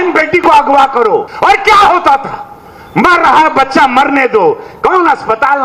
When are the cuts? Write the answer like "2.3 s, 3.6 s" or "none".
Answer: 1.3 s